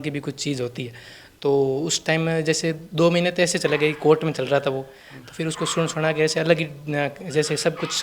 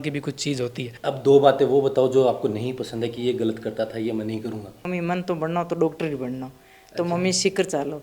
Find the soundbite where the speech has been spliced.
second; 2 cuts; at 0.9 s, 4.9 s

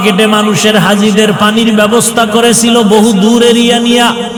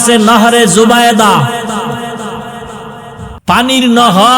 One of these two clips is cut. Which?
second; 1 cut; at 3.3 s

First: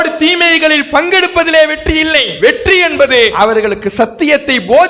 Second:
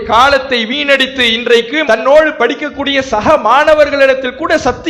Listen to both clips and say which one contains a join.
first; 2 cuts; at 2.3 s, 3.3 s

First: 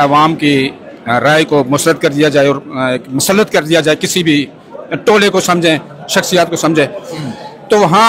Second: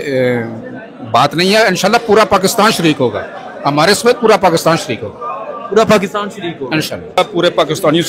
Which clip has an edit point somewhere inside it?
second; 1 cut; at 7.2 s

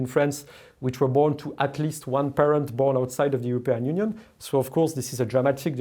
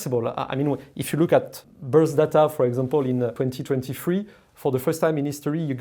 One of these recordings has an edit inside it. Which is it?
second; 2 cuts; at 1.6 s, 3.3 s

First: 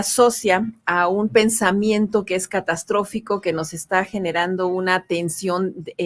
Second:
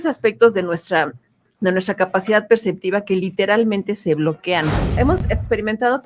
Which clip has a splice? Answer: second; 1 cut; at 5.0 s

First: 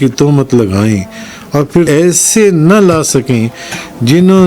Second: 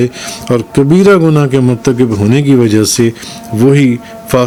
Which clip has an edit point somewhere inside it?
first; 1 cut; at 1.9 s

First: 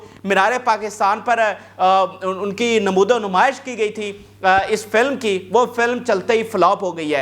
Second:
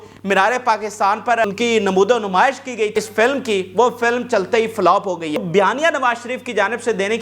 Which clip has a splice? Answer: second; 3 cuts; at 1.5 s, 2.9 s, 5.4 s

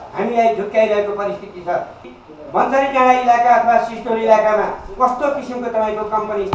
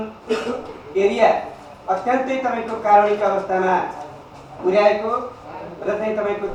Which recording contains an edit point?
first; 1 cut; at 2.0 s

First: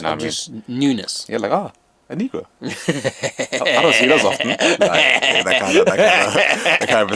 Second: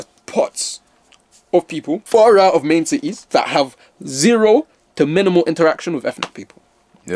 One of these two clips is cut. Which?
second; 2 cuts; at 2.0 s, 3.2 s

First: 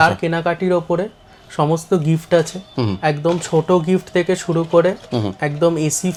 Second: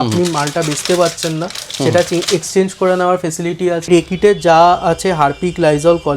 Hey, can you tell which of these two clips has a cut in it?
second; 1 cut; at 3.9 s

